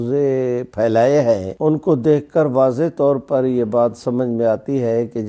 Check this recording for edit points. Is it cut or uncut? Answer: cut